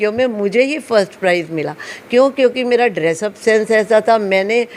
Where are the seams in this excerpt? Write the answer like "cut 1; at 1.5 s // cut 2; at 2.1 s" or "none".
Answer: none